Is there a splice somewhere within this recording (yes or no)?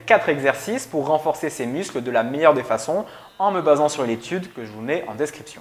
no